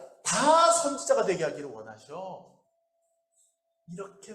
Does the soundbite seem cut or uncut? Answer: uncut